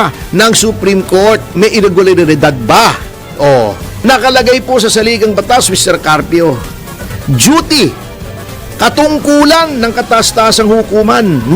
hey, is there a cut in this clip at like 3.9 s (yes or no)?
yes